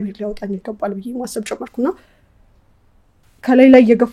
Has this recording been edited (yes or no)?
no